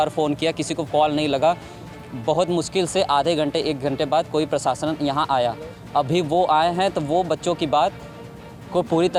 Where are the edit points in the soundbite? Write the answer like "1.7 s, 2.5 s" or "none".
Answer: none